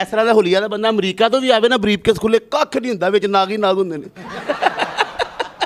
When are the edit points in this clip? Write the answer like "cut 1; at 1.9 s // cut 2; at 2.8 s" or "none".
none